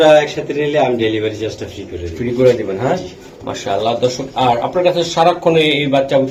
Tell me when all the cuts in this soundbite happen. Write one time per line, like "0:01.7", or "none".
none